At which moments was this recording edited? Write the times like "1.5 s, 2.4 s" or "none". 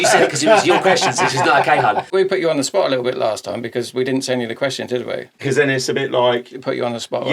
2.1 s, 5.4 s